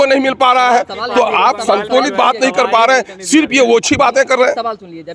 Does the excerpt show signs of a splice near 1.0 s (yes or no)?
no